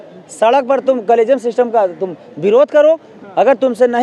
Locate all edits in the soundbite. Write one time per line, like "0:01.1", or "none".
none